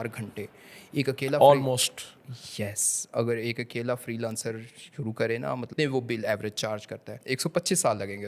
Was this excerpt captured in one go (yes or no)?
no